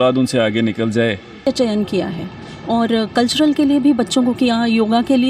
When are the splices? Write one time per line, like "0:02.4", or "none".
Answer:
0:01.4

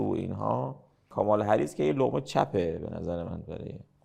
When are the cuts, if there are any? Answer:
0:01.0

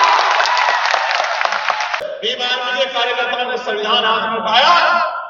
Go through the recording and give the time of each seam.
0:02.0

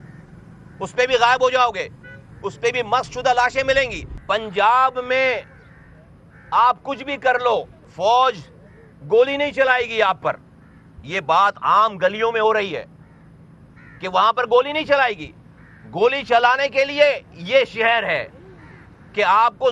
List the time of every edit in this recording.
0:04.1
0:07.8

